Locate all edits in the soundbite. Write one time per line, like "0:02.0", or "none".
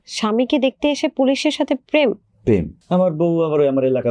0:02.8